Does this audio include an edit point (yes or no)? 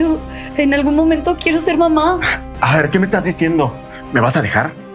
no